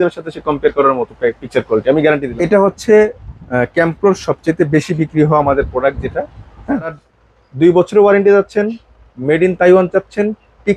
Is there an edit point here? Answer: yes; 2 cuts; at 2.3 s, 7.0 s

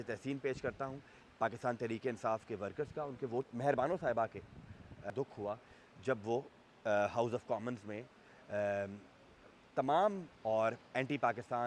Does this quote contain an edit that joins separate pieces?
yes; 3 cuts; at 3.4 s, 5.1 s, 10.3 s

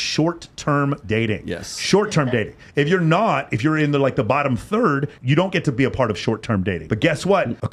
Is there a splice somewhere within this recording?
no; 0 cuts

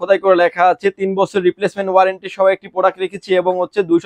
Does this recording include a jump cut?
no; 0 cuts

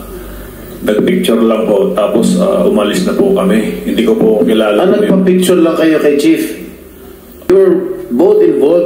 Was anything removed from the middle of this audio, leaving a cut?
yes; 1 cut; at 7.5 s

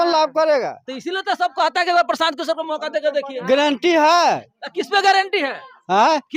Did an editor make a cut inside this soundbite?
no; 0 cuts

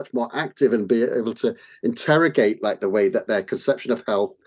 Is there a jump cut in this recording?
no; 0 cuts

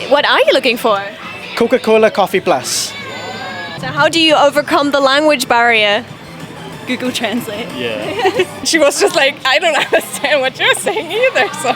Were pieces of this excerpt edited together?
yes; 2 cuts; at 3.7 s, 8.7 s

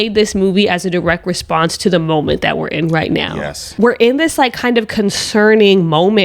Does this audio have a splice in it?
yes; 1 cut; at 3.8 s

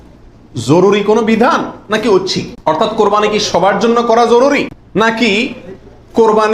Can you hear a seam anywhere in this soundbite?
yes; 2 cuts; at 2.5 s, 5.0 s

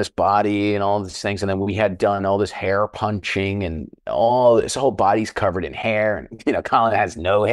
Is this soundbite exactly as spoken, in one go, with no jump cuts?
yes; 0 cuts

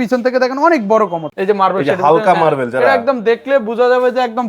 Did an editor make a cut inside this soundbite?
yes; 1 cut; at 1.3 s

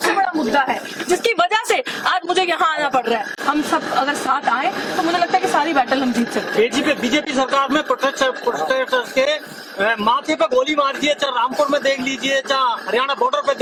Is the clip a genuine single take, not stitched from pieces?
yes; 0 cuts

